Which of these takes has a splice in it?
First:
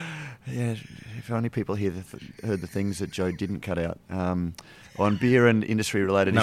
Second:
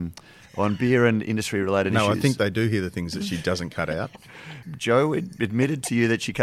second; 1 cut; at 4.6 s

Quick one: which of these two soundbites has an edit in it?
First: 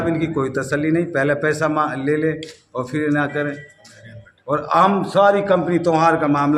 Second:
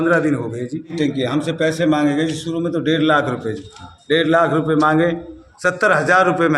second; 2 cuts; at 0.9 s, 5.4 s

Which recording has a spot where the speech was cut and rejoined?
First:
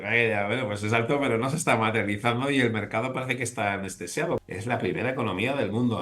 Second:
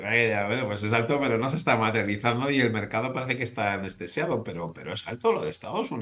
first; 1 cut; at 4.5 s

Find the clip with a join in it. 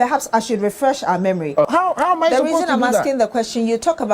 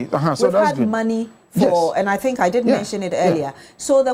first; 1 cut; at 1.7 s

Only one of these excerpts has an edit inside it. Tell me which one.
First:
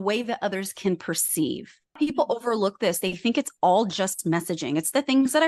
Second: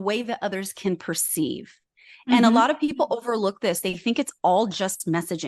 first; 1 cut; at 2.0 s

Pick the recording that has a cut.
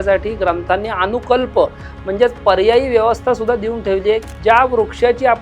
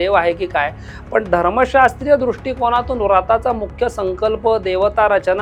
first; 1 cut; at 4.3 s

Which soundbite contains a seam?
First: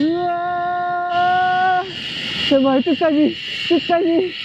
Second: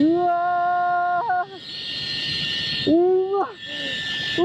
first; 1 cut; at 1.1 s

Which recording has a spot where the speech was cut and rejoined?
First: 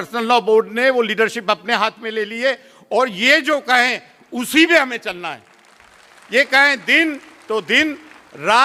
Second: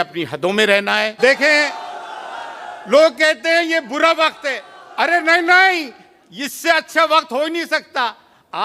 second; 1 cut; at 1.1 s

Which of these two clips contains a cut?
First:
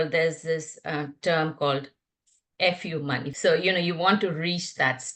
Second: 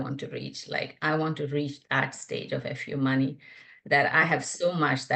first; 1 cut; at 3.3 s

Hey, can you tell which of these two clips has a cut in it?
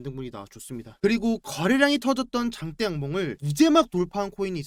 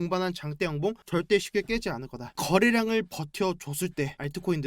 second; 1 cut; at 2.4 s

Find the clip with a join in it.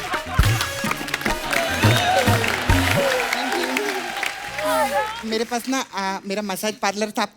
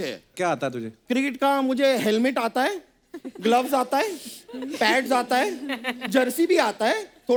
first; 1 cut; at 5.2 s

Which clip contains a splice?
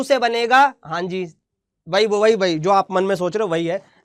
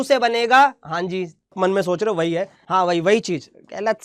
second; 2 cuts; at 1.5 s, 2.6 s

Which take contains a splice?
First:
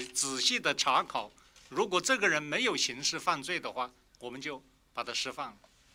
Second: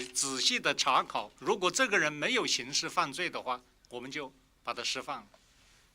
second; 1 cut; at 1.3 s

